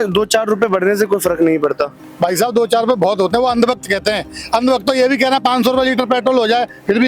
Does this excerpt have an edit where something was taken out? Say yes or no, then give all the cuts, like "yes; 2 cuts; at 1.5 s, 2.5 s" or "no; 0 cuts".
no; 0 cuts